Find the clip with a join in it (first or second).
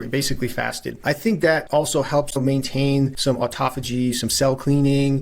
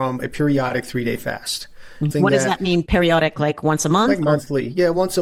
first